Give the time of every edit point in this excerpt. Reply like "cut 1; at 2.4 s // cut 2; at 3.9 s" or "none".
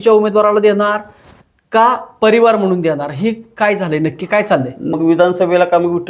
cut 1; at 4.9 s

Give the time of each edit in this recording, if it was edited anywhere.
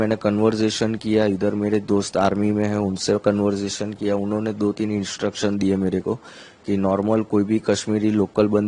none

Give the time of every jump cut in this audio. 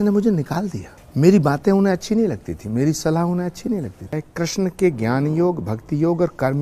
cut 1; at 4.2 s

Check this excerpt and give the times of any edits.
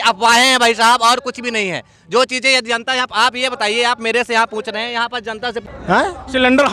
cut 1; at 5.6 s

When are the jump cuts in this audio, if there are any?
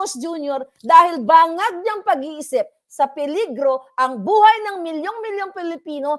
none

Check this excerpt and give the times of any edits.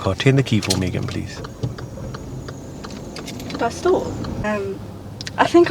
cut 1; at 4.4 s

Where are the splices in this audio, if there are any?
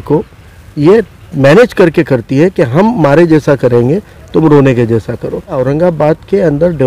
cut 1; at 5.6 s

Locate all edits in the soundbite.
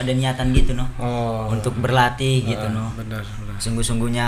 none

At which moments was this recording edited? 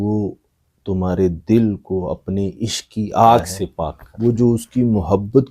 cut 1; at 4.0 s

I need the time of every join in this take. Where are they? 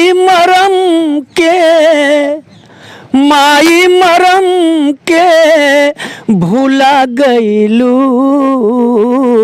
none

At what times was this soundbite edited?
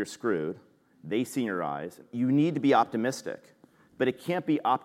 cut 1; at 2.0 s

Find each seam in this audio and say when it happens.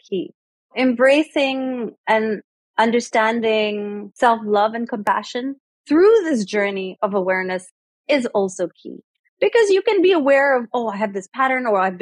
cut 1; at 0.7 s // cut 2; at 1.9 s // cut 3; at 4.0 s

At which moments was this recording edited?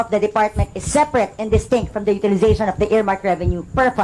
none

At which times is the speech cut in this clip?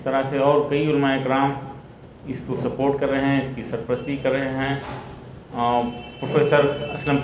none

